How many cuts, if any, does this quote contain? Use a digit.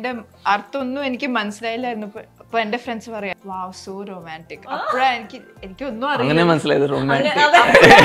1